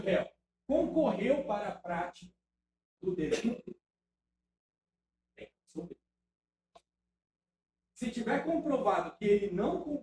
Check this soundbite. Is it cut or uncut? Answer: uncut